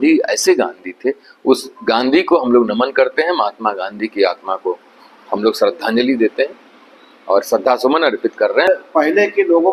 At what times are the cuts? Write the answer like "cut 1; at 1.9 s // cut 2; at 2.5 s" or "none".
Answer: cut 1; at 8.7 s